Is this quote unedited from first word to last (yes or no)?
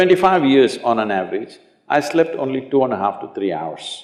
yes